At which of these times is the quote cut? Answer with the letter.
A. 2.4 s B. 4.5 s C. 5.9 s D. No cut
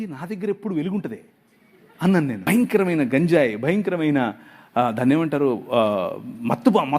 A